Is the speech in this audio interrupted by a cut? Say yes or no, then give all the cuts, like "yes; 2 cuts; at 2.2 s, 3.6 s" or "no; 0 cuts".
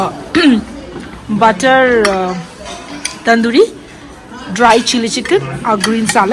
no; 0 cuts